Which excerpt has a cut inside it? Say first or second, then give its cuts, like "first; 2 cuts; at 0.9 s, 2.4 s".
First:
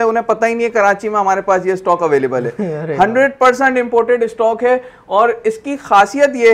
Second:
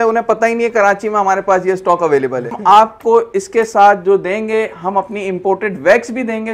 second; 1 cut; at 2.5 s